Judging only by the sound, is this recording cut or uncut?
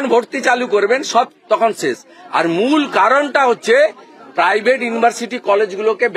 uncut